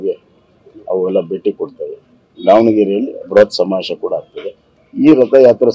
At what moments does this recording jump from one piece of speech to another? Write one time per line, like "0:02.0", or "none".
none

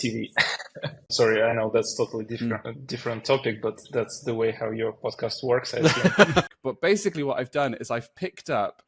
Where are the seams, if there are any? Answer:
0:01.0
0:06.6

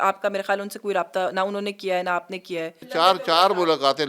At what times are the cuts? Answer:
0:02.9

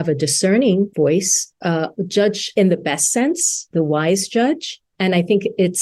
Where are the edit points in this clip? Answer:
0:00.9
0:02.4
0:03.6

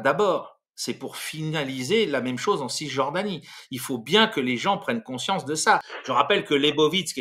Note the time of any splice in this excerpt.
0:05.9

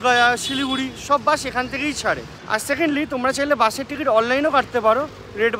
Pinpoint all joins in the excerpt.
none

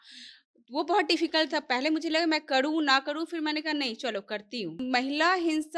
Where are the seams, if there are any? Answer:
0:04.8

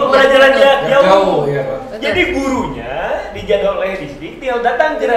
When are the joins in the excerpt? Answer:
none

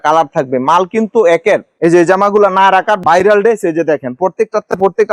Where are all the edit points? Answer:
0:01.7

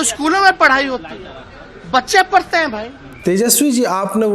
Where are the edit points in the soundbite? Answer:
0:03.0

